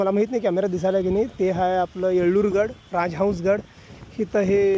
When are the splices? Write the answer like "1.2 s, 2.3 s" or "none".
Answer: none